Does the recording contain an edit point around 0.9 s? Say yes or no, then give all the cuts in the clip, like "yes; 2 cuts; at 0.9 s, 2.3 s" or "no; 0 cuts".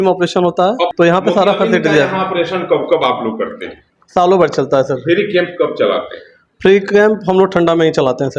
yes; 1 cut; at 0.9 s